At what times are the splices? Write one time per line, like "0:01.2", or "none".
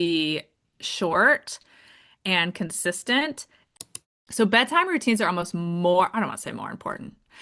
0:03.6